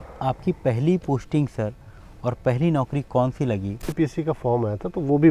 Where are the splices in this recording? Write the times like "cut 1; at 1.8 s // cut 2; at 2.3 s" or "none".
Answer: cut 1; at 3.9 s